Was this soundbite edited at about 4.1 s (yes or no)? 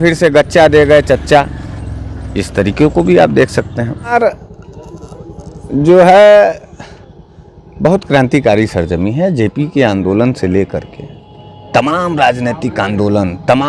yes